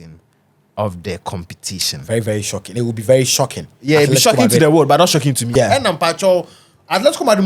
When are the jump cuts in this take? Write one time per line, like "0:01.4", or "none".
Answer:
0:05.4

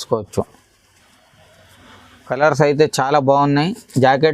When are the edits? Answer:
0:02.3

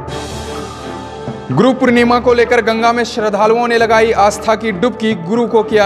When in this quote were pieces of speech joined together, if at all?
0:01.1

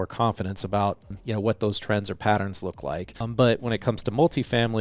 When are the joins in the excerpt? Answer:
0:01.1
0:03.2

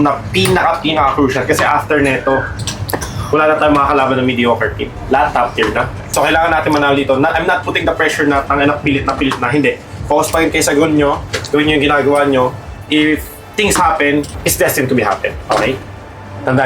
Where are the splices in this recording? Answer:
0:06.1
0:14.3

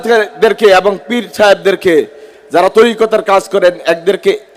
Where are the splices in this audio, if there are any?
none

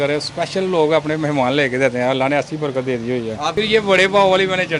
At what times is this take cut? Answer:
0:03.5

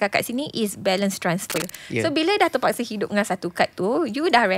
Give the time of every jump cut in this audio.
0:01.5

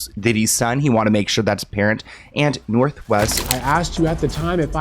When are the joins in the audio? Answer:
0:03.4

